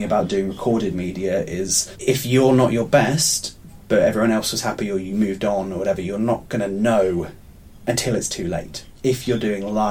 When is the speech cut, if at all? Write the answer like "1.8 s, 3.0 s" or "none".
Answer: 1.8 s, 8.8 s